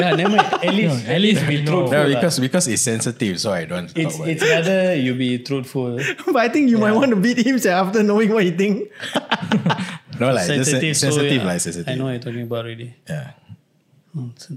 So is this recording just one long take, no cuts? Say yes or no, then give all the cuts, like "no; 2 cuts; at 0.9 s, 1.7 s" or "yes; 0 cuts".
yes; 0 cuts